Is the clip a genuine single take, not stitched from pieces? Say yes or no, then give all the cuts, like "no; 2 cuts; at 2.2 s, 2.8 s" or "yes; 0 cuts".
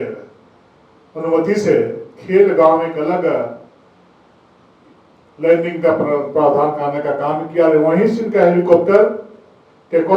yes; 0 cuts